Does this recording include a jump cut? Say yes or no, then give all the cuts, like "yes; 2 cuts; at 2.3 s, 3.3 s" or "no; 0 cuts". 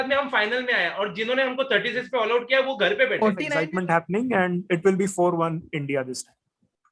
yes; 1 cut; at 3.6 s